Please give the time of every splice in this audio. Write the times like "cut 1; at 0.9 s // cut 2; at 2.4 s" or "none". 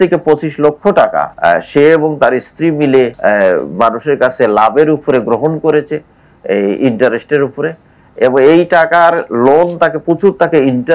cut 1; at 1.3 s // cut 2; at 3.1 s